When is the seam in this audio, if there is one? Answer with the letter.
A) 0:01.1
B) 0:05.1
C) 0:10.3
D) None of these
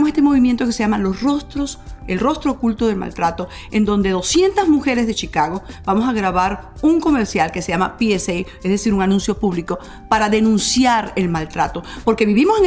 D